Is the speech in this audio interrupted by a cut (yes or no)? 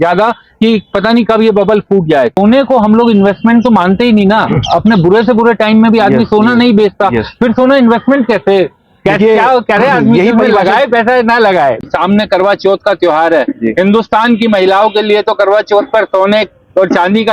yes